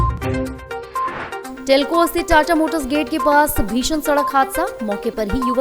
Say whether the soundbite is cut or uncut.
cut